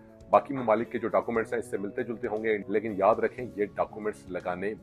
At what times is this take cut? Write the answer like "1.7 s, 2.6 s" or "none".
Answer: 2.6 s